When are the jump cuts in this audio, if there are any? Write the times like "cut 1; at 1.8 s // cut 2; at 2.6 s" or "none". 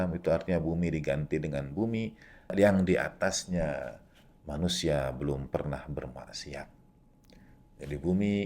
cut 1; at 2.5 s

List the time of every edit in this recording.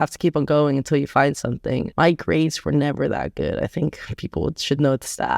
cut 1; at 1.9 s

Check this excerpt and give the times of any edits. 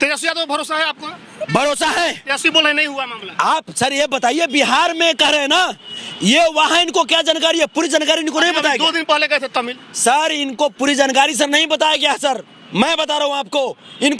none

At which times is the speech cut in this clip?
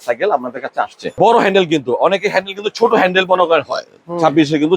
cut 1; at 1.2 s

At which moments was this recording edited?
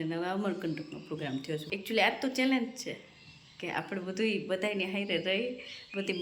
cut 1; at 1.7 s

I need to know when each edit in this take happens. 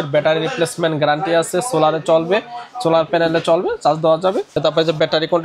cut 1; at 4.5 s

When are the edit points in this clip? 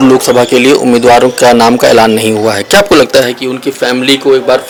none

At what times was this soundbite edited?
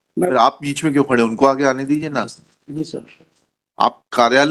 none

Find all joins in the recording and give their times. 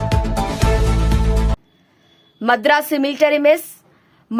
cut 1; at 1.7 s

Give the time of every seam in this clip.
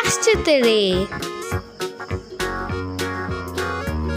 cut 1; at 1.1 s

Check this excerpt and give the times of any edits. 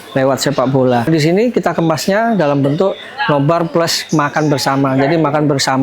cut 1; at 1.1 s

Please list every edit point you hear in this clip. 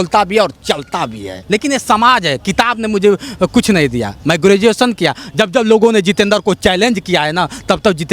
cut 1; at 1.3 s

